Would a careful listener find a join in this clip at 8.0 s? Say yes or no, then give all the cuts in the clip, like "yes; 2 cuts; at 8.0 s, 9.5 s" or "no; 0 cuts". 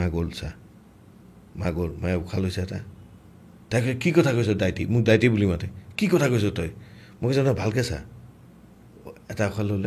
no; 0 cuts